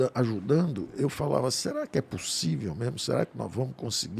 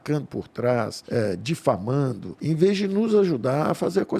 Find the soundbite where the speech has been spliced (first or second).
second